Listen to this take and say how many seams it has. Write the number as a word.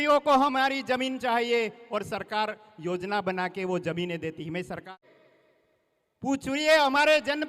one